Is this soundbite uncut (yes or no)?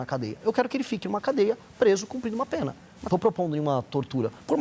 no